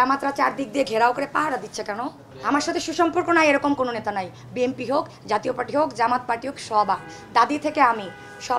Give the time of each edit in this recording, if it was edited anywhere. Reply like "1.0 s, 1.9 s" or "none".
2.3 s